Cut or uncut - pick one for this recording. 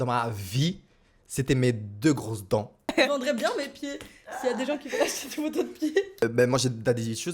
cut